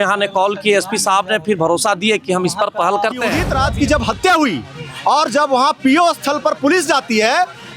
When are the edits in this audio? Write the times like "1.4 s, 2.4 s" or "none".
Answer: 3.5 s